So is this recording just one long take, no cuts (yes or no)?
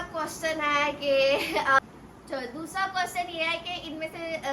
no